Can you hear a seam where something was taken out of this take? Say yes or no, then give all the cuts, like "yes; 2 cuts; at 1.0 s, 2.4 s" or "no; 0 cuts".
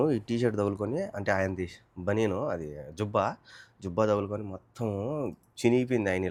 no; 0 cuts